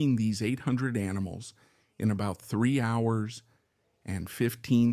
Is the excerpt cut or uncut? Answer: uncut